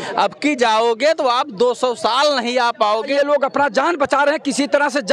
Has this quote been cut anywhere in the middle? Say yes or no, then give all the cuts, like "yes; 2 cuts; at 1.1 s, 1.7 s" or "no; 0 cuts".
yes; 1 cut; at 3.1 s